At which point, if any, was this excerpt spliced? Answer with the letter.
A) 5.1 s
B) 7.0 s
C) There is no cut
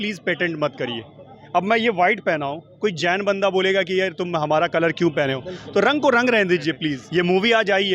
B